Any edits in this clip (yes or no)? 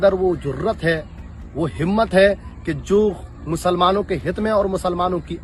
no